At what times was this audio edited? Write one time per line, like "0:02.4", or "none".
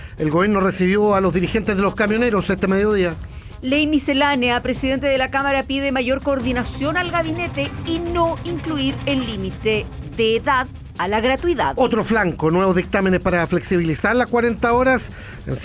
none